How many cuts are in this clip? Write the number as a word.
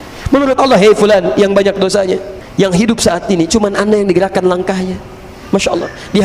one